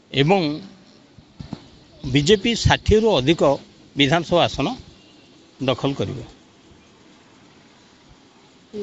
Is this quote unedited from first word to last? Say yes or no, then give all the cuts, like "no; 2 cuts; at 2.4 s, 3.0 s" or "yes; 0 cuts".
yes; 0 cuts